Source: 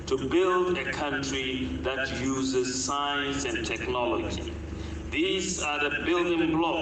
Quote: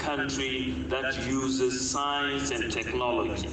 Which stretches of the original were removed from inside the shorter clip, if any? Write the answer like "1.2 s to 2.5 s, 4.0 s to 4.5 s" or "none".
none